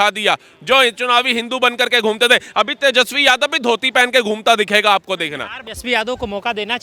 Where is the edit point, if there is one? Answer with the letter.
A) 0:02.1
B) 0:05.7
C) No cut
B